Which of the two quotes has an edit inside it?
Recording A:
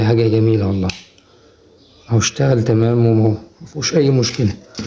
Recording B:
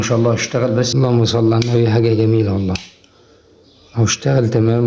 B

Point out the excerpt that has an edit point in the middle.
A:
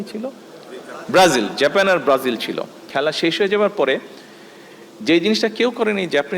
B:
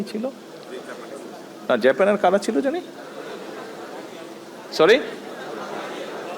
A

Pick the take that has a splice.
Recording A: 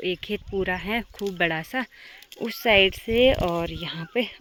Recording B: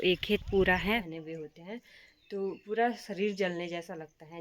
B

